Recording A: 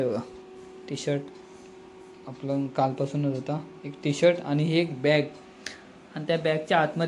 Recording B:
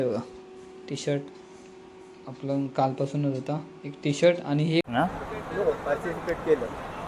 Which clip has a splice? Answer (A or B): B